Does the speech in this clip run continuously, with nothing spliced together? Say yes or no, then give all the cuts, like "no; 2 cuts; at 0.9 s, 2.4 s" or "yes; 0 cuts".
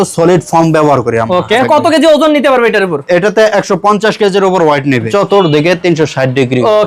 no; 2 cuts; at 1.6 s, 5.1 s